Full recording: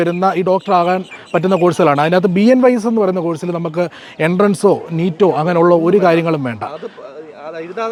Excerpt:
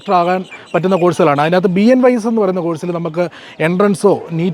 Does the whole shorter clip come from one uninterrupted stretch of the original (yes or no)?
yes